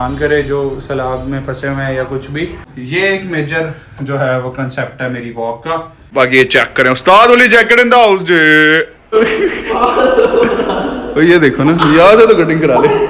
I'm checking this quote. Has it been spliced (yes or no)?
yes